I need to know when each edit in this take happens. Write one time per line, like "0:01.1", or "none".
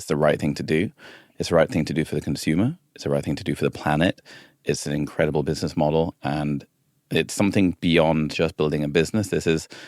0:04.5

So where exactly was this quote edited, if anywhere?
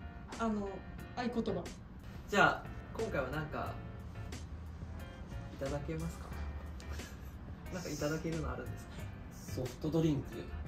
none

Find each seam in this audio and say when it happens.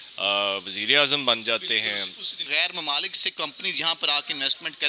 0:02.4

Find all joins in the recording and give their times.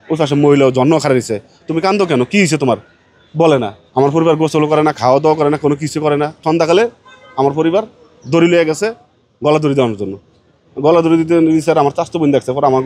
0:03.8
0:06.4

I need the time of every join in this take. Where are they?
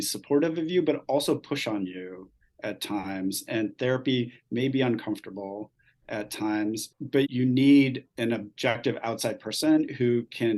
0:07.3
0:08.8

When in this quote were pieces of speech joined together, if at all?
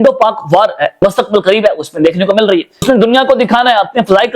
0:01.0
0:02.8

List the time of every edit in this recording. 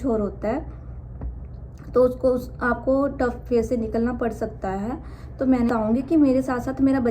0:05.7

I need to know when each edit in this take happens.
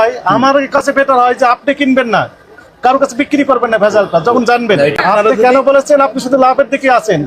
0:04.9

